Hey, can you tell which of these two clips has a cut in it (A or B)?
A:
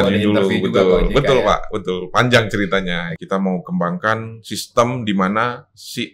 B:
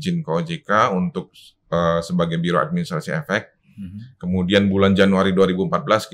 A